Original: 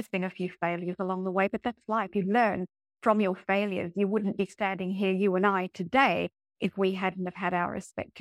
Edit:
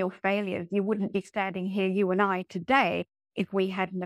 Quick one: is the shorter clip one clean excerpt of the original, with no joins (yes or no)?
yes